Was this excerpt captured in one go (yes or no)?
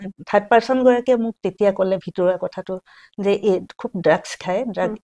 yes